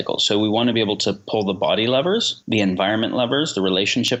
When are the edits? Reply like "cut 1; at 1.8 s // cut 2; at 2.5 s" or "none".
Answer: none